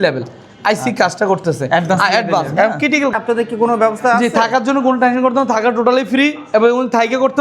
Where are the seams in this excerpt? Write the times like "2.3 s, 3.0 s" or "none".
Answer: 3.1 s